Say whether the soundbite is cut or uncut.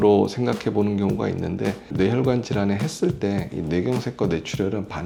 uncut